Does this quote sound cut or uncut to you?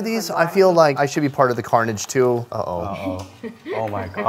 cut